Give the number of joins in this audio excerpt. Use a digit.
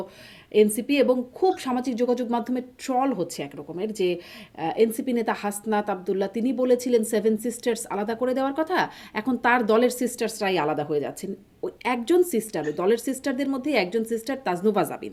0